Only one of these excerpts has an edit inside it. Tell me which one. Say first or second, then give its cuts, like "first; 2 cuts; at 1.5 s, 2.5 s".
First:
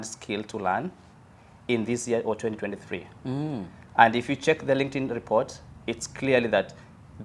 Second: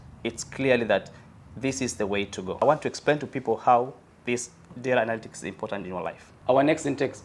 second; 2 cuts; at 2.6 s, 6.4 s